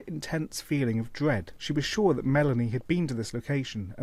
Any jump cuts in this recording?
yes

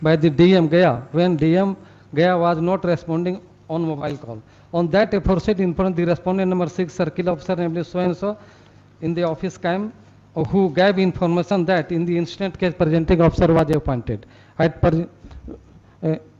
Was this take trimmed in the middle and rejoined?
no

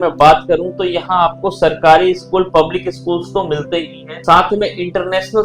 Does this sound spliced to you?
no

